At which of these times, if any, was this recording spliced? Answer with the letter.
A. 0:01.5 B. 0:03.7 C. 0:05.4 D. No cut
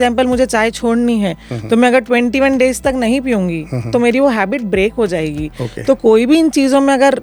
D